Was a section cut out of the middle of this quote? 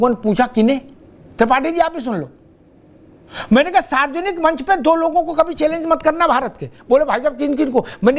no; 0 cuts

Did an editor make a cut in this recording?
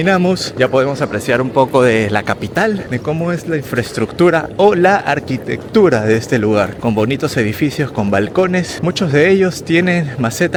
no; 0 cuts

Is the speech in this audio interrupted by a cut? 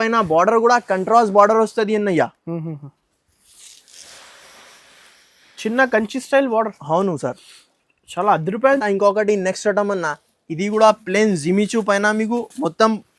yes; 1 cut; at 8.8 s

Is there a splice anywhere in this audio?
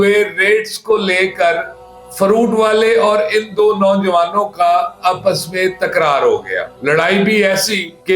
yes; 1 cut; at 6.7 s

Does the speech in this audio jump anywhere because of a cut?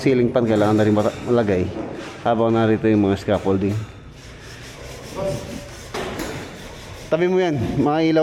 no; 0 cuts

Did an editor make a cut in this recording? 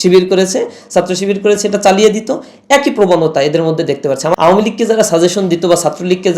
yes; 1 cut; at 4.4 s

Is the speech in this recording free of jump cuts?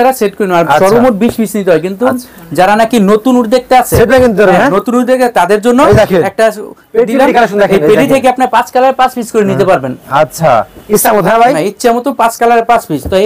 yes; 0 cuts

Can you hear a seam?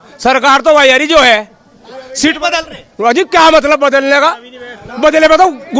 no; 0 cuts

